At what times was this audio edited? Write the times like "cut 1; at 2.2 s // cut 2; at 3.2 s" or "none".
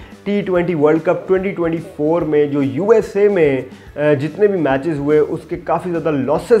none